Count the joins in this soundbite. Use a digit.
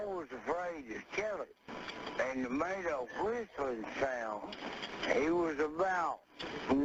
0